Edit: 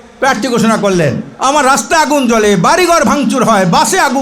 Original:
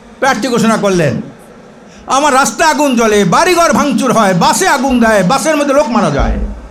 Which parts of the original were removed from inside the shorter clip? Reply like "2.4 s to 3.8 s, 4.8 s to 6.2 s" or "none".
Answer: 1.3 s to 2.0 s